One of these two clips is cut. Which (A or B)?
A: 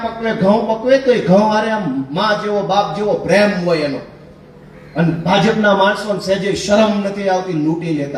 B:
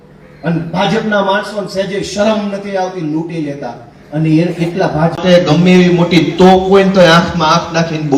B